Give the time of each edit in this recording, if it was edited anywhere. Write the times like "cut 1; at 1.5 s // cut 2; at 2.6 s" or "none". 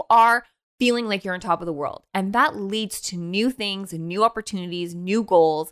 none